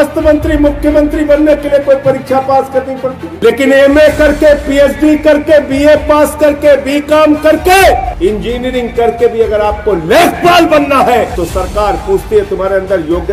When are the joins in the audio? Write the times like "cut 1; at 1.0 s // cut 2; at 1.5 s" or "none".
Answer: cut 1; at 3.2 s // cut 2; at 8.1 s // cut 3; at 11.3 s